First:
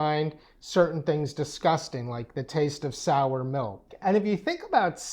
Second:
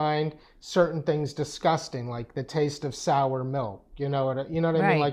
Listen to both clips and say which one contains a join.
first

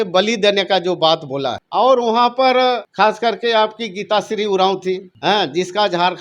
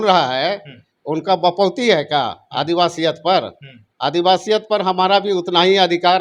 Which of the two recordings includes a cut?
first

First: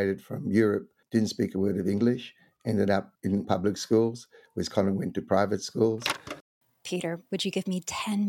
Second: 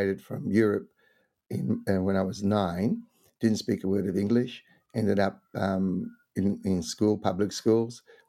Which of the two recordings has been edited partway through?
first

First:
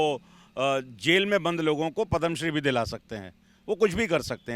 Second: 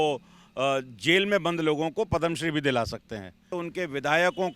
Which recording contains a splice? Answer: second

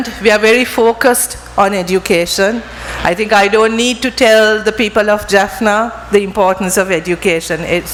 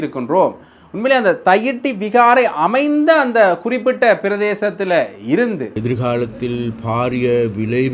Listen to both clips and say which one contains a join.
second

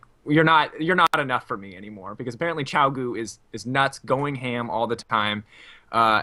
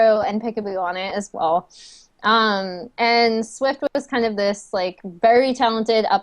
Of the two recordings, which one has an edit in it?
second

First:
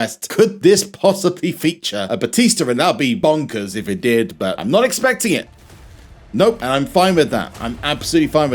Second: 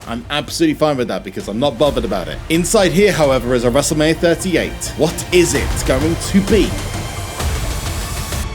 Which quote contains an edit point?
second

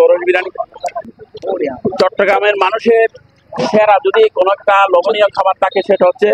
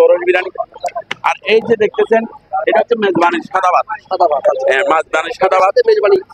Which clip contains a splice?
first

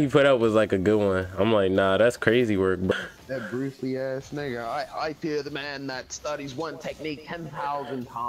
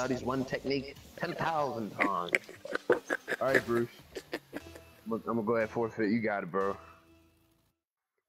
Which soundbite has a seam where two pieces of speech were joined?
first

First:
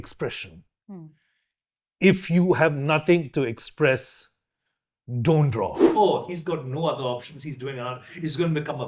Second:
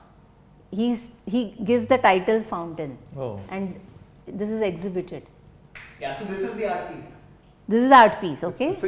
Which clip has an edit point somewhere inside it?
first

